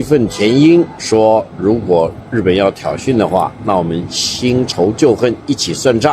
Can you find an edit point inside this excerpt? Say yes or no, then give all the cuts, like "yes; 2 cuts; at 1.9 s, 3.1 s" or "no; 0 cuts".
yes; 1 cut; at 1.0 s